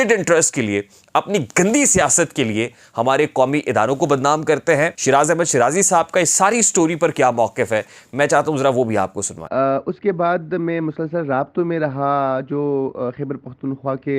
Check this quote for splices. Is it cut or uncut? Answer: cut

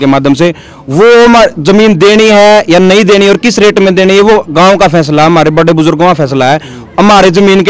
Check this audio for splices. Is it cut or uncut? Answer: uncut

